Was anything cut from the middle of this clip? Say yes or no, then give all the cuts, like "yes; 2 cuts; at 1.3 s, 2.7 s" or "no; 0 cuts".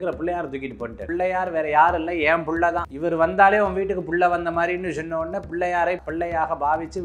yes; 3 cuts; at 1.0 s, 2.9 s, 6.1 s